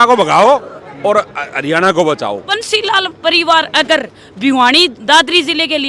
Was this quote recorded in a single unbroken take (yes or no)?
no